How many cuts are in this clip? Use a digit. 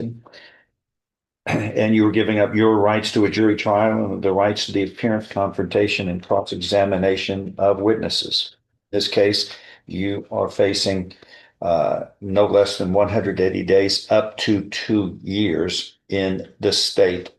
0